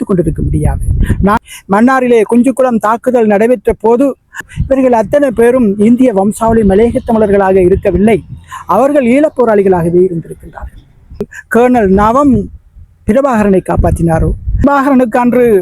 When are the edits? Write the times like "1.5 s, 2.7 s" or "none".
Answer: 1.4 s, 4.5 s, 11.3 s, 14.6 s